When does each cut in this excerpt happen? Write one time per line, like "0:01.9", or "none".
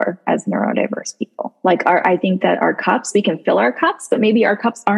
0:01.5

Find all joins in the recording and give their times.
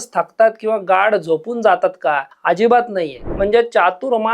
0:02.3
0:03.2

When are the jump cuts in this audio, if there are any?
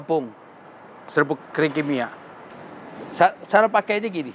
0:02.5

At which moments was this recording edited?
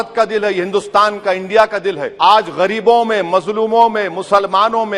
0:02.1

